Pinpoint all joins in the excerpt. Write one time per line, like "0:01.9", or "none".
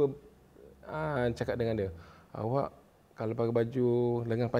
none